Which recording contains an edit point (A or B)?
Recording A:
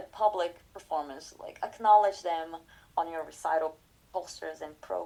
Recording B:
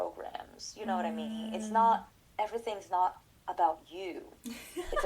B